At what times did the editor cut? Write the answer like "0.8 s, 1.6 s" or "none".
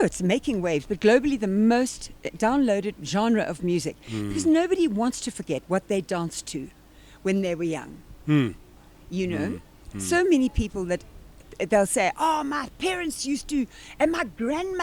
none